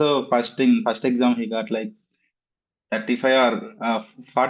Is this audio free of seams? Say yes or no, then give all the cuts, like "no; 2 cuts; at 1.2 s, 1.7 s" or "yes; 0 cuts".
yes; 0 cuts